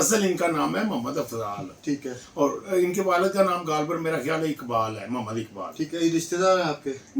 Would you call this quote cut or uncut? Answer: uncut